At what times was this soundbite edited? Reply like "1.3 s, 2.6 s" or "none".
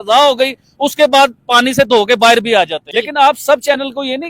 2.8 s